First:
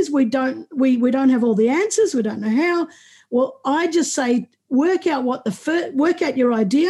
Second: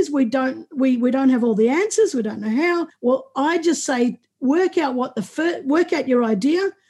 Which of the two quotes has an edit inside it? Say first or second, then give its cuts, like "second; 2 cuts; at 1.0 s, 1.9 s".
second; 1 cut; at 2.9 s